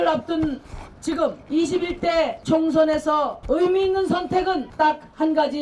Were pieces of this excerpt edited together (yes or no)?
yes